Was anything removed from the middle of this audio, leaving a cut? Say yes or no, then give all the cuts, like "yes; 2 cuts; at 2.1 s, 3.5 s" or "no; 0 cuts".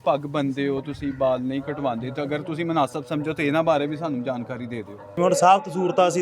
yes; 1 cut; at 5.2 s